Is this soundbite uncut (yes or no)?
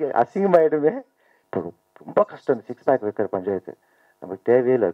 no